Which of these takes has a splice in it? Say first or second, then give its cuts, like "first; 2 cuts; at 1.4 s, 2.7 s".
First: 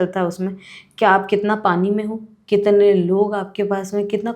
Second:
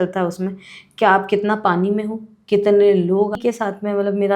second; 1 cut; at 3.4 s